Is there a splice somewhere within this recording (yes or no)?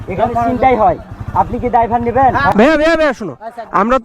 yes